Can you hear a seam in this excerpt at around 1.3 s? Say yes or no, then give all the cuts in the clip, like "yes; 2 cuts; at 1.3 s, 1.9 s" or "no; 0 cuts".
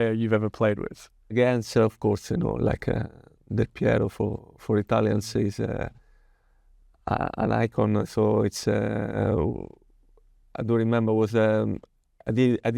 yes; 1 cut; at 1.3 s